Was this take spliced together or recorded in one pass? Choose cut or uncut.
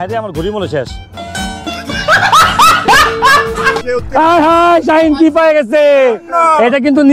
cut